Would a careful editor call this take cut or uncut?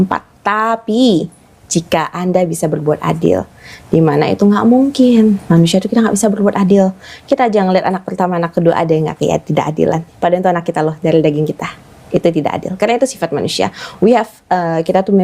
uncut